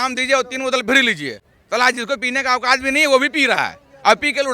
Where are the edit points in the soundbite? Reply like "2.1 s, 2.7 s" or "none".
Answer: 1.5 s